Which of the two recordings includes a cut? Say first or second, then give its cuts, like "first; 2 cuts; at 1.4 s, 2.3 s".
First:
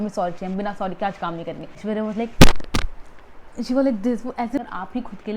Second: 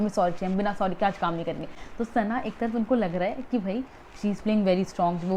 first; 2 cuts; at 1.8 s, 4.6 s